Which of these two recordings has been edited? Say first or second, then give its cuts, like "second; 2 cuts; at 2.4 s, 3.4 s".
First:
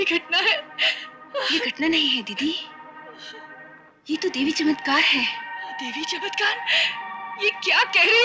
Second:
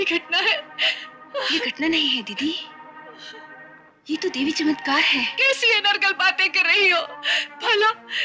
second; 1 cut; at 5.3 s